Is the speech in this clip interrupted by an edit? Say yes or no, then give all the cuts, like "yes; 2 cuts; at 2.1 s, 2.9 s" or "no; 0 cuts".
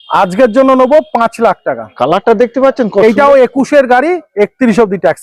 no; 0 cuts